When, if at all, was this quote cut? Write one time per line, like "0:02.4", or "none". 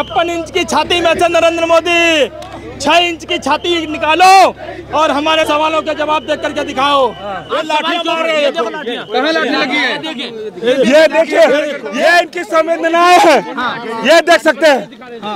0:05.5
0:07.4
0:11.8